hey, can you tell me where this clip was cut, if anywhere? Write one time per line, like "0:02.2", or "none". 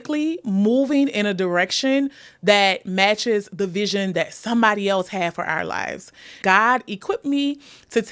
0:06.5